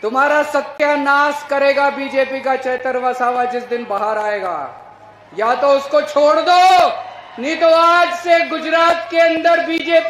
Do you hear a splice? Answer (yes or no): no